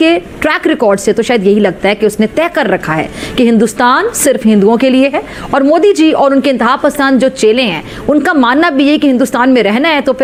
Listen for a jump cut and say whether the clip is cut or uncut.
uncut